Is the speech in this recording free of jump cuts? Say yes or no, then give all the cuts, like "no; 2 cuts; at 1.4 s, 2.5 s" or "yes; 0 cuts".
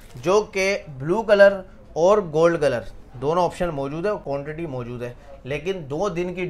yes; 0 cuts